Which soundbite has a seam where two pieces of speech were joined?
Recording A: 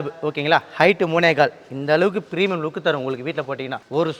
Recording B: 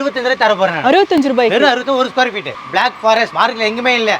B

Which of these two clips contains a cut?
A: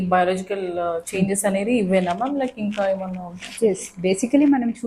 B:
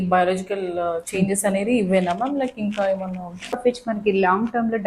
B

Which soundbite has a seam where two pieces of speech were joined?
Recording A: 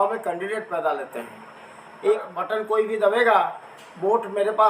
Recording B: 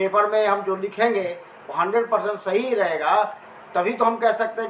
A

